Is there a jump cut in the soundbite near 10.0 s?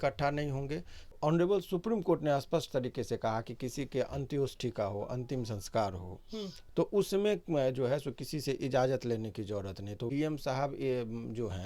yes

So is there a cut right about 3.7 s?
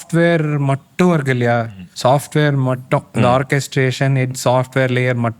no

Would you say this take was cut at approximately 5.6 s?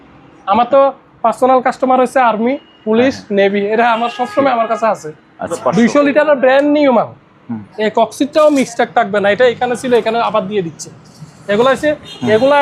yes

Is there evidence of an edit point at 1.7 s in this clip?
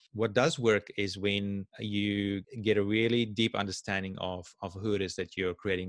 yes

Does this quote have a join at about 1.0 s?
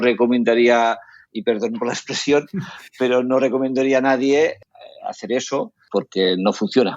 no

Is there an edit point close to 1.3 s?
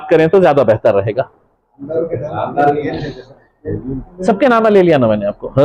no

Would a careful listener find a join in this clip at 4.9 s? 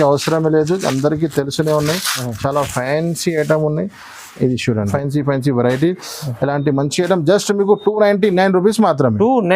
yes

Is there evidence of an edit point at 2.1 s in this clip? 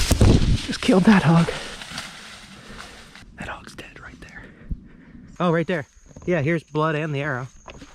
no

